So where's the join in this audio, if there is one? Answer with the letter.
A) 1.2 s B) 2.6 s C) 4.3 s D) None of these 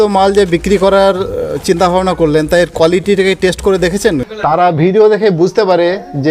C